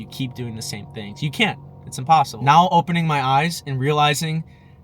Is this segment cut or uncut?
cut